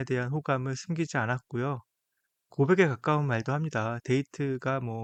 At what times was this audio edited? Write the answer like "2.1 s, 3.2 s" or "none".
none